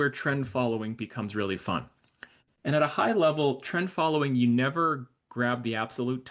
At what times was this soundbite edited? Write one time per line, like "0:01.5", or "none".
none